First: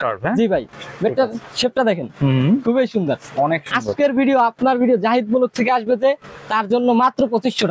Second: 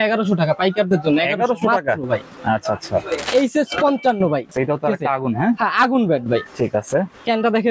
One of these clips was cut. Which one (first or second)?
second